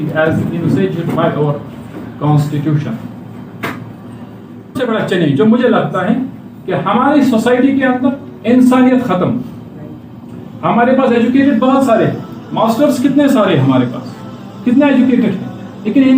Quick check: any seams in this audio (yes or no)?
yes